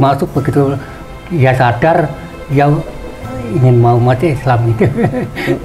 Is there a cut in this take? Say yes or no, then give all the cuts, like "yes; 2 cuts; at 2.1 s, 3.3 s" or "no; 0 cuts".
no; 0 cuts